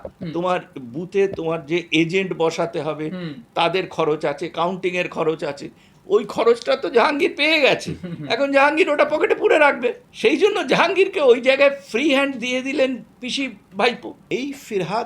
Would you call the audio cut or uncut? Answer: cut